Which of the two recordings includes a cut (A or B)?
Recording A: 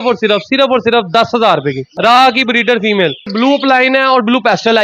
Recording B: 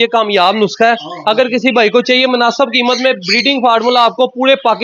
A